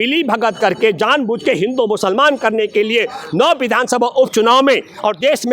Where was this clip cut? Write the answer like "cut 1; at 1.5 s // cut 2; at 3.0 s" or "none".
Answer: none